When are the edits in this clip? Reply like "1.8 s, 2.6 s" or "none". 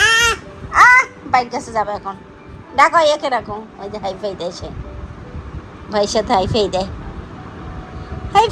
none